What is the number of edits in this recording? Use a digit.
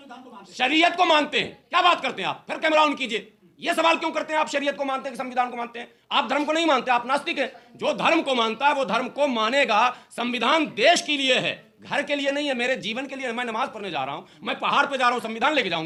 0